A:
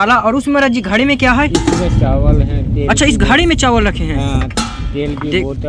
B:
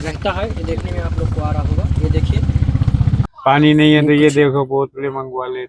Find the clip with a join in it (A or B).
B